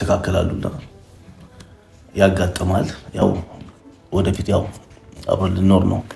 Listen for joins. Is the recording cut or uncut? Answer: cut